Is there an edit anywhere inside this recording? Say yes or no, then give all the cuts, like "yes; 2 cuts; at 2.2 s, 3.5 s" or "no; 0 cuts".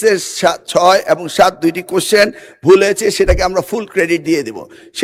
no; 0 cuts